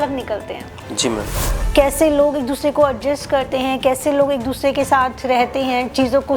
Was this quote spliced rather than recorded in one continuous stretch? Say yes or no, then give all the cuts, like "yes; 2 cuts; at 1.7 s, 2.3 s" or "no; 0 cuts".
yes; 1 cut; at 1.5 s